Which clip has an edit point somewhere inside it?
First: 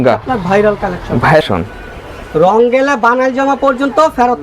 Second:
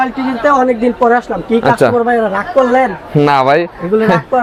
first; 1 cut; at 1.4 s

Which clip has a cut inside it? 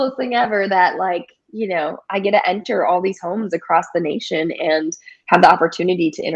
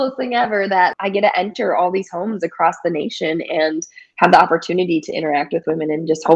second; 1 cut; at 0.9 s

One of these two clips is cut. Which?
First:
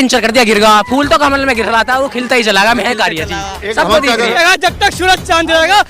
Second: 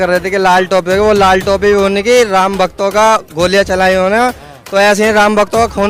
first; 1 cut; at 4.4 s

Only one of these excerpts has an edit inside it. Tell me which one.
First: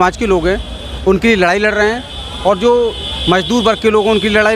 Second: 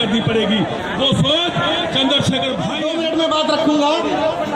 second; 1 cut; at 2.7 s

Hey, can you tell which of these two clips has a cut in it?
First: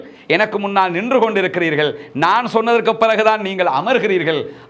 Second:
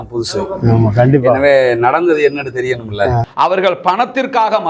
second; 1 cut; at 3.3 s

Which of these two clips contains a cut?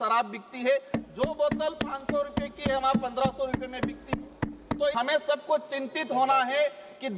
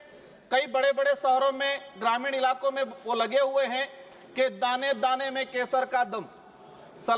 first; 1 cut; at 4.9 s

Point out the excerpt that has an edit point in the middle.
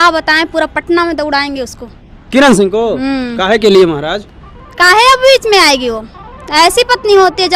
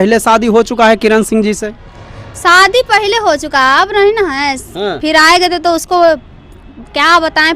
second; 1 cut; at 4.7 s

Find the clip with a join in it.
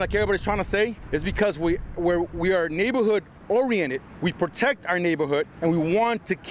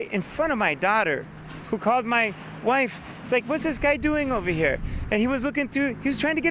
first; 3 cuts; at 1.0 s, 4.1 s, 5.5 s

